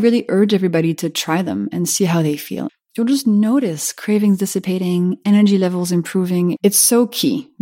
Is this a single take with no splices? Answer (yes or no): no